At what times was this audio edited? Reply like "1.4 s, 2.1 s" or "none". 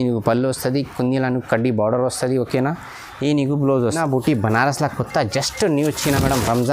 4.0 s